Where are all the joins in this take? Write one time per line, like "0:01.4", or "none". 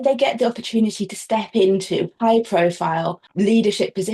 0:03.2

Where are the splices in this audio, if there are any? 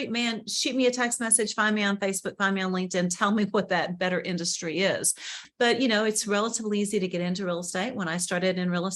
0:05.4

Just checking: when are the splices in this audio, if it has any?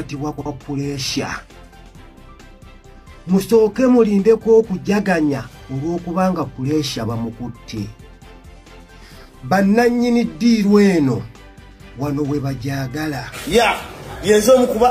0:13.3

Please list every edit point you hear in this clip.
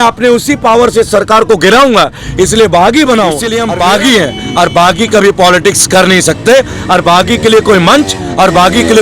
0:03.5

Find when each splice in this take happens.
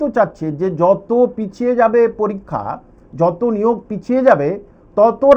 none

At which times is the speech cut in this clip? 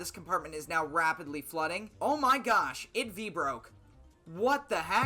0:01.9

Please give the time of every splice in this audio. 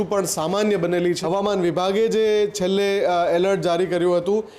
0:01.2

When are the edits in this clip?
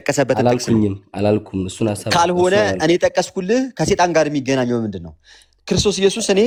none

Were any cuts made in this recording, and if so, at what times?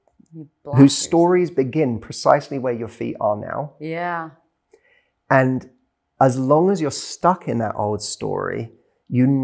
none

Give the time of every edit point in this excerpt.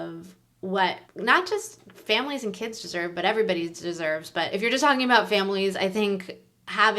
0:01.1
0:04.5

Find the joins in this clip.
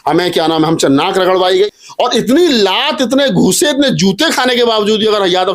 0:01.7

